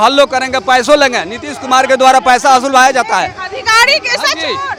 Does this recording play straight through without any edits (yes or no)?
yes